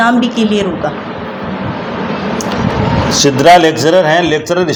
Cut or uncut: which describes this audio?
uncut